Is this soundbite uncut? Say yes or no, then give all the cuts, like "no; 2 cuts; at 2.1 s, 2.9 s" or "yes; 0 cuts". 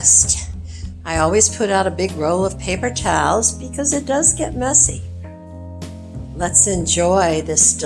yes; 0 cuts